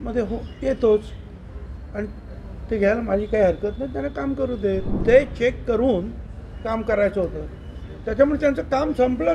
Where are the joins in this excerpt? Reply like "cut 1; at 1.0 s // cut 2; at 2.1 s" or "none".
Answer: cut 1; at 4.9 s